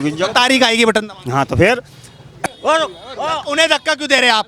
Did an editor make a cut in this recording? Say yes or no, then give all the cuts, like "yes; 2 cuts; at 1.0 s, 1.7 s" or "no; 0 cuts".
yes; 1 cut; at 2.4 s